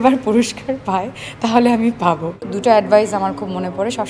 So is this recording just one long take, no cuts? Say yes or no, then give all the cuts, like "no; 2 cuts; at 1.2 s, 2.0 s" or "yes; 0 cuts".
no; 1 cut; at 2.4 s